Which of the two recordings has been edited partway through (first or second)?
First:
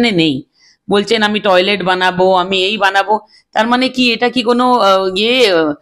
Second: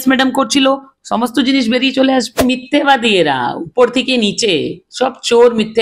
second